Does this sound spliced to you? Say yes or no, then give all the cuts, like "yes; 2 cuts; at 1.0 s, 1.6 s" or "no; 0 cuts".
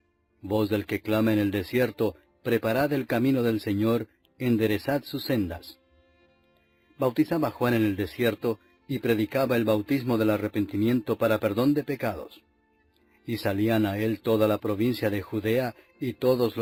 no; 0 cuts